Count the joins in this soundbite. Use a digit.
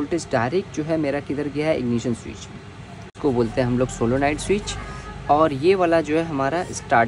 1